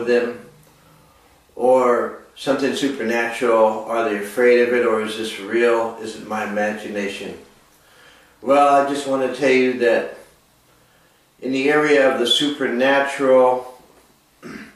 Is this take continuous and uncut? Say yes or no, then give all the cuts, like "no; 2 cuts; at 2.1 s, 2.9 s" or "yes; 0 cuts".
yes; 0 cuts